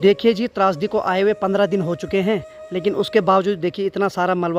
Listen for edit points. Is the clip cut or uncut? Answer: uncut